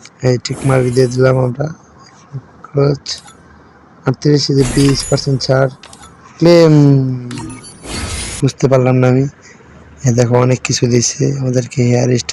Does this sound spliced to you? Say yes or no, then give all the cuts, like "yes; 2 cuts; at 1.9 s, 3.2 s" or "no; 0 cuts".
yes; 1 cut; at 8.4 s